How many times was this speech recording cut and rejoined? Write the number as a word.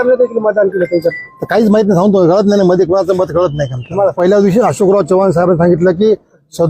one